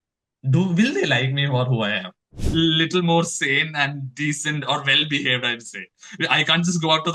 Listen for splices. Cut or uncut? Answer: cut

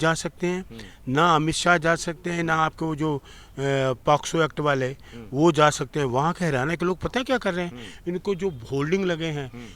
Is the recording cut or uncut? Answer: uncut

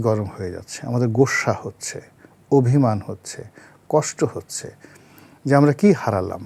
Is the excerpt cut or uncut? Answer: uncut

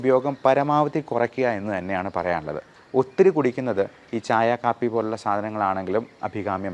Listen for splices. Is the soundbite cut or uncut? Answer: cut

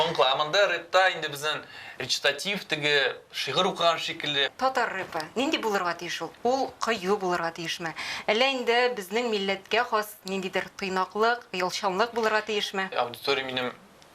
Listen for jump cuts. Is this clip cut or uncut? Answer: cut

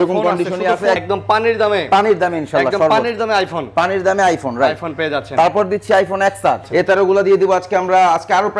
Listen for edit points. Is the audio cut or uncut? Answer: cut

